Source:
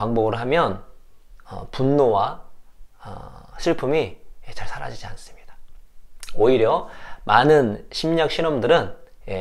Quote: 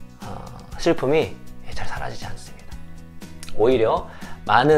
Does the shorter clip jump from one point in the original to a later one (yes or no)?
no